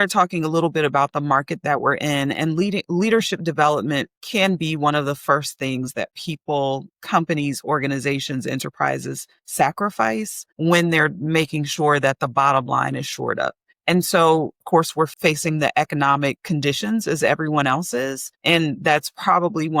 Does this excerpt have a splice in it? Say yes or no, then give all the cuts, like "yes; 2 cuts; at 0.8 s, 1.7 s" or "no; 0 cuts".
yes; 2 cuts; at 14.8 s, 16.4 s